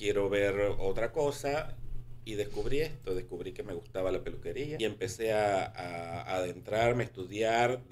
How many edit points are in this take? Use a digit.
1